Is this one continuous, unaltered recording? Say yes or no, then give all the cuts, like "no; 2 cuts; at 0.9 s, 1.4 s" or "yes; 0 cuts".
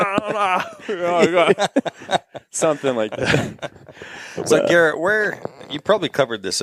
yes; 0 cuts